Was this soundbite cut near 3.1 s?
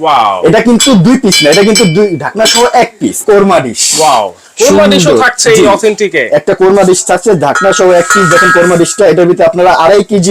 yes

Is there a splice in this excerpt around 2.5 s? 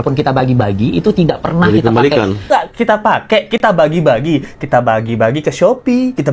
yes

